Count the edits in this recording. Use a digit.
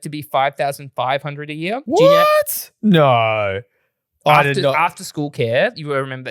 1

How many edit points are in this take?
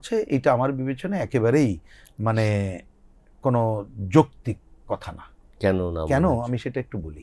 0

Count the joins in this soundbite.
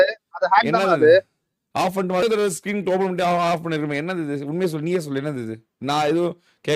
1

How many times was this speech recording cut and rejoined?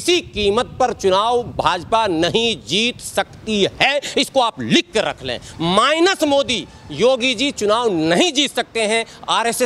0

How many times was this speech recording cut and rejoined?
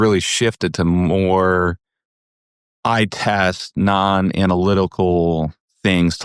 0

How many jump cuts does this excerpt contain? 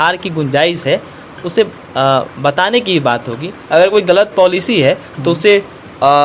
0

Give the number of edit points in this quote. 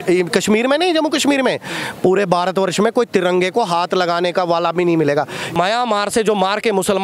1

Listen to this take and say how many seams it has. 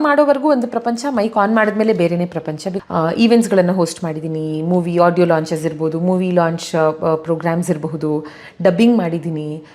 1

